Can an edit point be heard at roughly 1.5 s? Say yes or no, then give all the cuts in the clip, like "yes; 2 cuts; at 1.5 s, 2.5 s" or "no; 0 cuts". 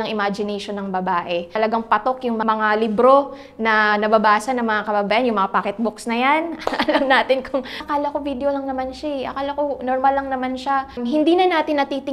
yes; 4 cuts; at 1.5 s, 2.4 s, 7.9 s, 10.9 s